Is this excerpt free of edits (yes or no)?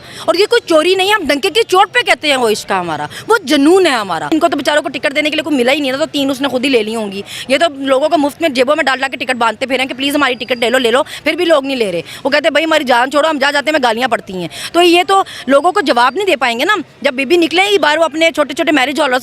no